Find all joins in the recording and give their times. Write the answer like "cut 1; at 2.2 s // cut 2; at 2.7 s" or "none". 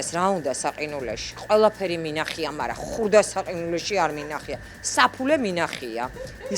none